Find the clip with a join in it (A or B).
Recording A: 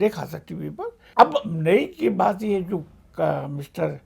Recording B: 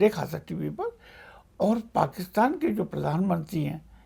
A